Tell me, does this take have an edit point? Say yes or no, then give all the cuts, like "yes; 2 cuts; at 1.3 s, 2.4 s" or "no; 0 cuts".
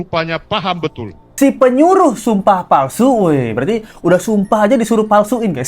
yes; 1 cut; at 1.2 s